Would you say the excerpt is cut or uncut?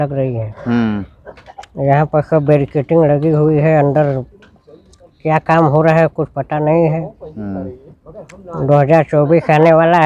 uncut